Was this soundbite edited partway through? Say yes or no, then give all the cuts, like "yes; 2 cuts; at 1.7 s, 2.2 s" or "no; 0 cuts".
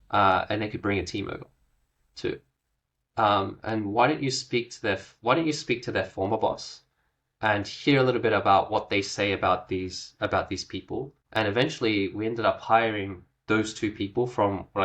yes; 1 cut; at 11.2 s